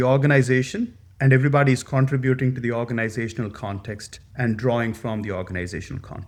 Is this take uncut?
yes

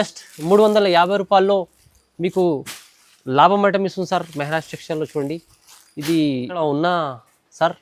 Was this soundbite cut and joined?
no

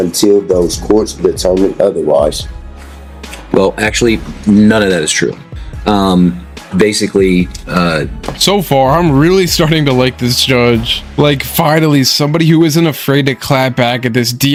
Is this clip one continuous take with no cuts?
yes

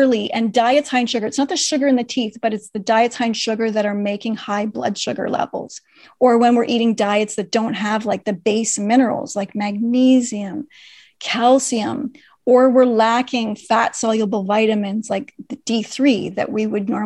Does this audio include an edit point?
no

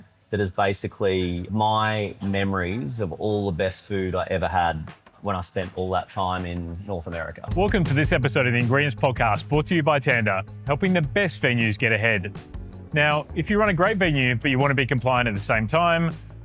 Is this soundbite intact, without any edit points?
no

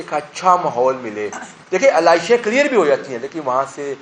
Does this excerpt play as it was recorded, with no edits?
yes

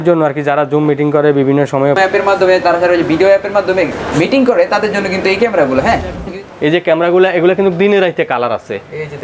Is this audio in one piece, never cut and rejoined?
no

